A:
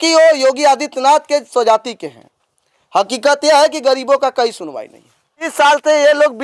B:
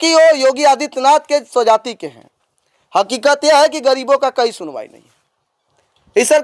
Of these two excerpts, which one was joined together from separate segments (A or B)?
A